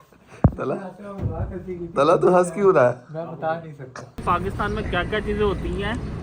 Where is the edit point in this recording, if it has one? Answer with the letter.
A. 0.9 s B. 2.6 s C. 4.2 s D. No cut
C